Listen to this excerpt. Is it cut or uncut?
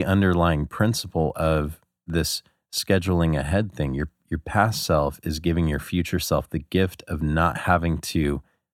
cut